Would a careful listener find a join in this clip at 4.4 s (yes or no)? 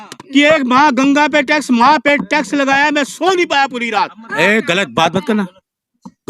yes